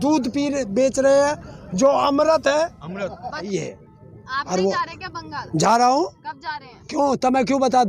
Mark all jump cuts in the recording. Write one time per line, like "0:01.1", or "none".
0:03.5